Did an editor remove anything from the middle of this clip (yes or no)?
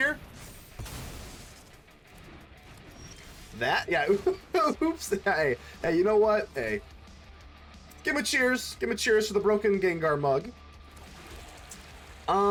no